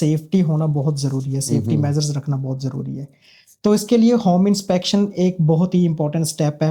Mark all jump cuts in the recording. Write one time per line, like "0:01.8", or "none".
none